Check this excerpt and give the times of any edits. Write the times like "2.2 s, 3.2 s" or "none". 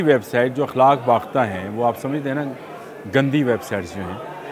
none